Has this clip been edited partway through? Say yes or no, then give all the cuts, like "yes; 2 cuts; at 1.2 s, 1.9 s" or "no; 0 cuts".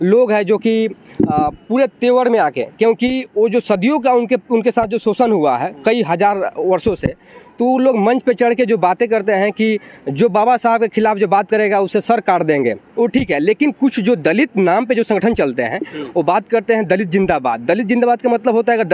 yes; 1 cut; at 12.8 s